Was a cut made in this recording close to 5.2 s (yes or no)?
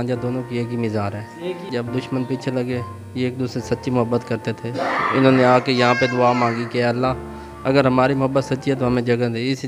no